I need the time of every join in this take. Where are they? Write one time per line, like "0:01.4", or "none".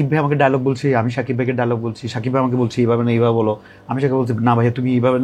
none